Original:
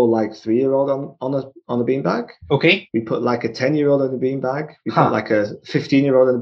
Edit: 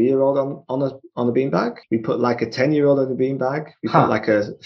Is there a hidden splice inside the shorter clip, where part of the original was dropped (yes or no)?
yes